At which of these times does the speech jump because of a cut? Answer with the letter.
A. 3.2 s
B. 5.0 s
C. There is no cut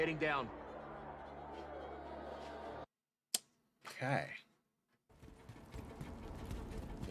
B